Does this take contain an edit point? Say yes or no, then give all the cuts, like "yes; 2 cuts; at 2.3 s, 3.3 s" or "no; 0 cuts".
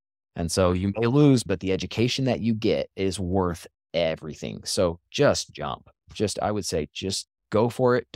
yes; 2 cuts; at 1.4 s, 2.9 s